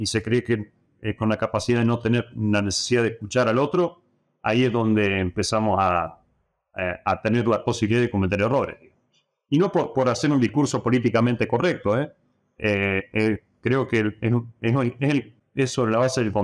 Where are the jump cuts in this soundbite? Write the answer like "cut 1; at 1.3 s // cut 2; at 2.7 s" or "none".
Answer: cut 1; at 15.4 s